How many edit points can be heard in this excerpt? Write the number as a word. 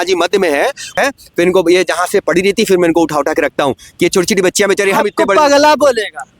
one